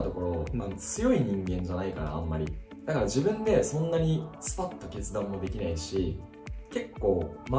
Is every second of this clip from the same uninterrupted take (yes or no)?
yes